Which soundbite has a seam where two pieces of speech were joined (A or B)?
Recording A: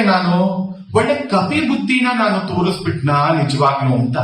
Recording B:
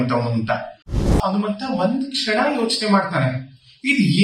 B